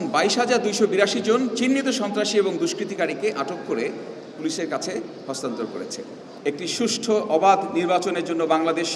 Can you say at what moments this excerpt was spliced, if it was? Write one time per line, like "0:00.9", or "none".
0:06.2